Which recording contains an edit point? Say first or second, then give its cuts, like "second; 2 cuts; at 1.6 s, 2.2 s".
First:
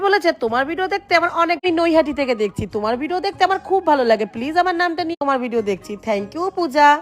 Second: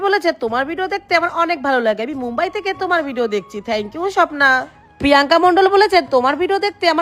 first; 2 cuts; at 1.6 s, 5.2 s